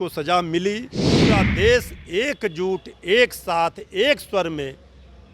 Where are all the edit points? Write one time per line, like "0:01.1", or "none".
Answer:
0:01.4

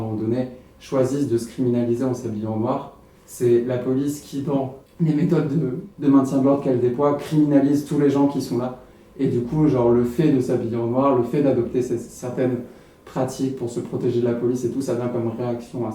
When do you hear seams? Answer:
0:04.8
0:05.8

